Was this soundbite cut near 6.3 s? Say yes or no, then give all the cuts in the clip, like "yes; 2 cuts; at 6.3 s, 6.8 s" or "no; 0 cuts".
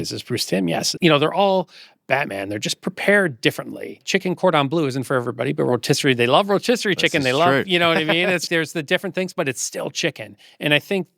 no; 3 cuts; at 0.9 s, 4.0 s, 8.5 s